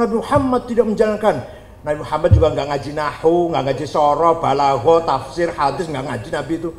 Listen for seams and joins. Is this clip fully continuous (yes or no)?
yes